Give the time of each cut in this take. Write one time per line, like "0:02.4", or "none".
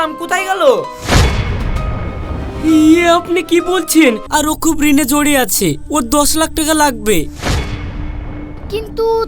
0:04.2

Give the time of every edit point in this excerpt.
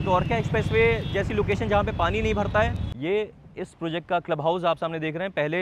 0:02.9

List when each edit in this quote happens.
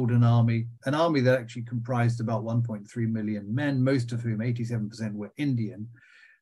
none

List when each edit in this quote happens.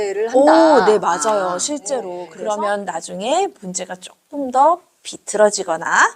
0:02.2

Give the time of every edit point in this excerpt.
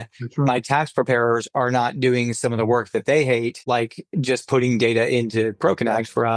0:03.6

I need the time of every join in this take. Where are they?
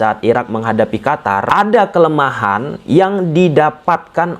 0:01.5

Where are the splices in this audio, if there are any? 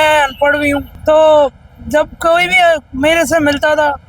0:00.9

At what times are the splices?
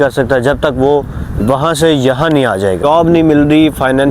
0:02.8

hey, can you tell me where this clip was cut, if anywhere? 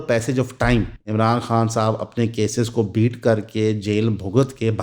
0:01.0

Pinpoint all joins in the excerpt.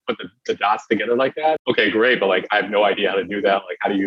0:01.6

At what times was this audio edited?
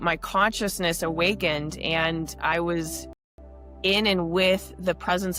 none

